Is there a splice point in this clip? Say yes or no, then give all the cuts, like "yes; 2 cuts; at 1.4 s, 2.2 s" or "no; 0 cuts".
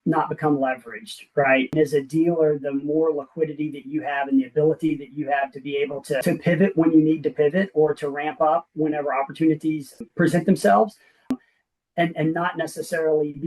yes; 4 cuts; at 1.7 s, 6.2 s, 9.9 s, 11.3 s